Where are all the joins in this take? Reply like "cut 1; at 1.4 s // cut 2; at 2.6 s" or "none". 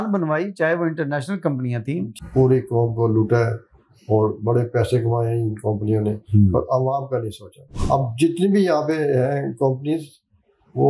cut 1; at 2.1 s // cut 2; at 7.7 s